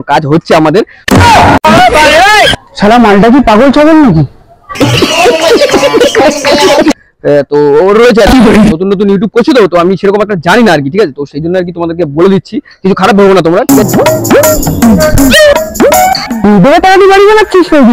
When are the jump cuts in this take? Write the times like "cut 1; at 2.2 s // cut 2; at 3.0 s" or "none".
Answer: none